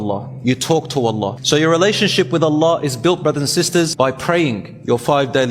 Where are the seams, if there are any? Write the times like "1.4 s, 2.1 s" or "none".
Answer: 1.4 s, 3.9 s

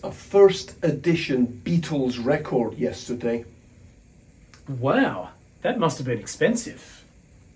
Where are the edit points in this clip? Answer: none

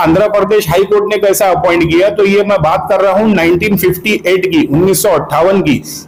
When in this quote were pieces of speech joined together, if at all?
none

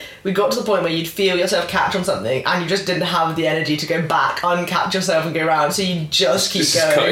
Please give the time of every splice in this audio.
none

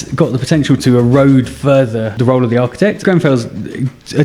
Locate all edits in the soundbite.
2.1 s, 3.0 s

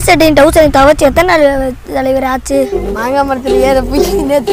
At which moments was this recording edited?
2.7 s

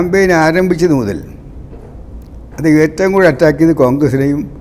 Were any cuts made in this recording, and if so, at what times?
none

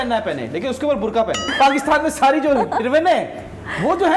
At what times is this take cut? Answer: 1.5 s

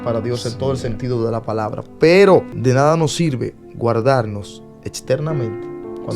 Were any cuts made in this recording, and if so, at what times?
2.5 s

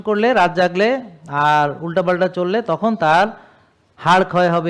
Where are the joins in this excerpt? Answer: none

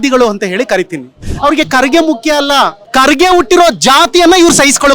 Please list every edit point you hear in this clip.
1.3 s, 2.8 s

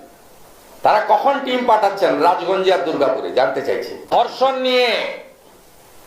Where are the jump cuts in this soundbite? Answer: 4.1 s

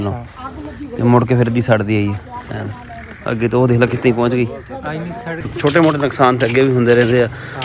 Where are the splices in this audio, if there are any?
5.4 s

